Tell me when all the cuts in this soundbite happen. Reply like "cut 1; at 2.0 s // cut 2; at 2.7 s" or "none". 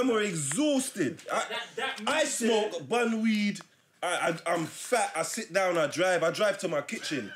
none